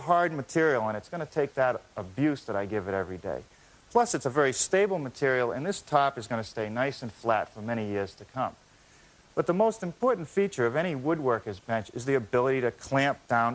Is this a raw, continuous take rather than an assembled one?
no; 1 cut; at 3.1 s

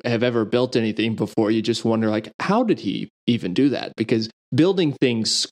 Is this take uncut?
yes; 0 cuts

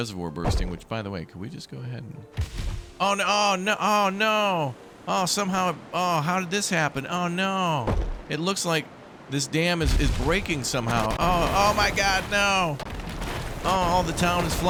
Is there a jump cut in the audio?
no; 0 cuts

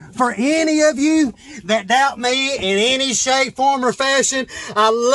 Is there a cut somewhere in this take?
no; 0 cuts

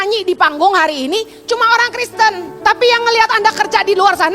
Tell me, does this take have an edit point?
yes; 1 cut; at 2.5 s

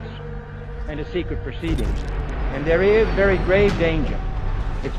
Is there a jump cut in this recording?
yes; 1 cut; at 2.2 s

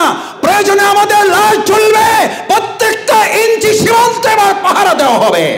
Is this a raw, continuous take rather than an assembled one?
yes; 0 cuts

